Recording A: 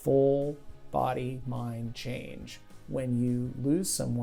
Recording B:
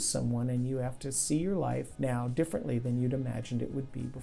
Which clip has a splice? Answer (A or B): B